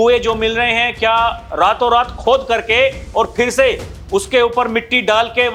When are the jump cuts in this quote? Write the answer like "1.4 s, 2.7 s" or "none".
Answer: none